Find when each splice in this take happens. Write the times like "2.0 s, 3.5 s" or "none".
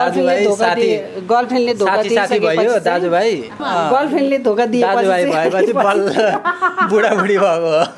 3.5 s